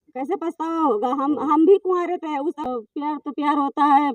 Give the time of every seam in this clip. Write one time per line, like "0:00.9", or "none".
0:02.6